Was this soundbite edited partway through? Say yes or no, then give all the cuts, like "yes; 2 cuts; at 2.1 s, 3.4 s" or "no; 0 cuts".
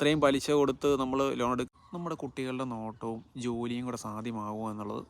yes; 1 cut; at 1.7 s